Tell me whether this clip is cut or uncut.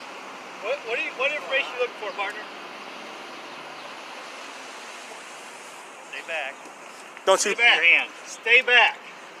uncut